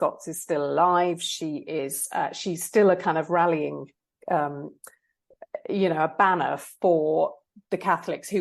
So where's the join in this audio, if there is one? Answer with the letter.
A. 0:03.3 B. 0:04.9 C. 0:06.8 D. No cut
D